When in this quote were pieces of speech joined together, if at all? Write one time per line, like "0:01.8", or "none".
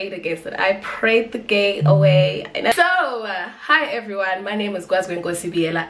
0:02.7